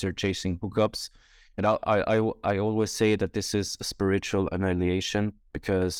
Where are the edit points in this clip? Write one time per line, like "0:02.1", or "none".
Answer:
none